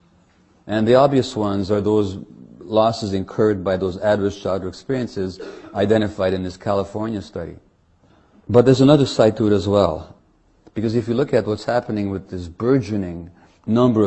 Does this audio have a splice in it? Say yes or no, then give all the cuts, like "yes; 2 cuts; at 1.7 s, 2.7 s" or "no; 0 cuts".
no; 0 cuts